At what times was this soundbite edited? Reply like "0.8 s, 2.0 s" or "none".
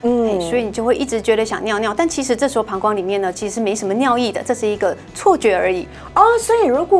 none